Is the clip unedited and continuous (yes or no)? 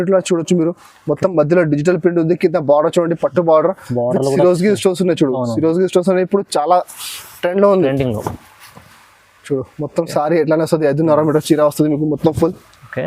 yes